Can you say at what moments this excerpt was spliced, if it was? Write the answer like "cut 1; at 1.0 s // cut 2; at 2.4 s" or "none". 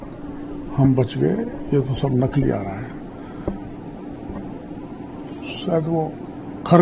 none